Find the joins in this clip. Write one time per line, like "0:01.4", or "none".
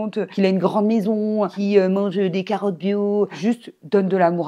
0:03.3